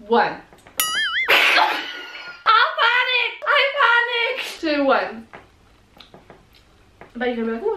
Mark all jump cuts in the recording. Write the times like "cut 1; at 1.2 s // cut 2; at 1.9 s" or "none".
none